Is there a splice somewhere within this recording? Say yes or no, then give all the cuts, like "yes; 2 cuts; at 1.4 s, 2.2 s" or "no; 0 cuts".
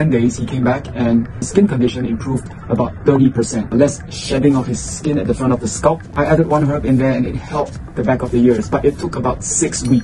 yes; 3 cuts; at 1.5 s, 3.7 s, 6.1 s